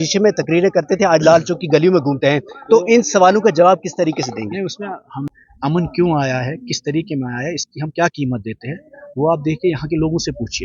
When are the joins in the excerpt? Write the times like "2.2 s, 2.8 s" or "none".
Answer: 5.2 s